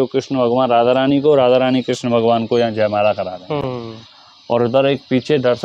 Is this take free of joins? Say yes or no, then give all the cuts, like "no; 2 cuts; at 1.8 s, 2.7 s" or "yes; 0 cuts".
yes; 0 cuts